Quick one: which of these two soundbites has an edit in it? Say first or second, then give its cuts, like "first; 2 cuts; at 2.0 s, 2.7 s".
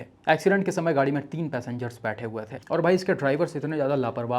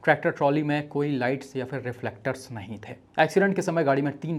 first; 1 cut; at 2.5 s